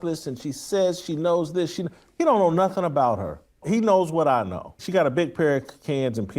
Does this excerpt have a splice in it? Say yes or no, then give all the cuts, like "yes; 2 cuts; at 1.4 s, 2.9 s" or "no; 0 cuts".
yes; 2 cuts; at 3.6 s, 4.8 s